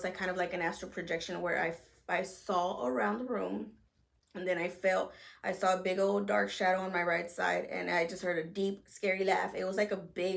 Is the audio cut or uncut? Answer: uncut